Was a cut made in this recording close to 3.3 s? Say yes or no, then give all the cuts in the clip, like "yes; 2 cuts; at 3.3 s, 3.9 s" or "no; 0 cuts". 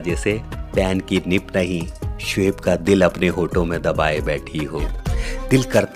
no; 1 cut; at 4.8 s